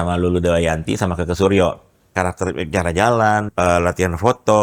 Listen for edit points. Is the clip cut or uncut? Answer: cut